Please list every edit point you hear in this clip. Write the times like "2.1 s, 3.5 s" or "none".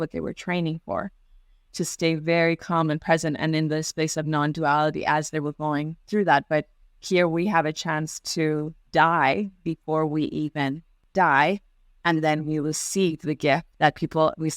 8.8 s, 10.9 s, 13.7 s